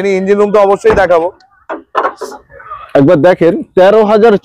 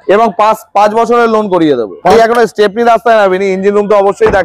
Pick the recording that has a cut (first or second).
second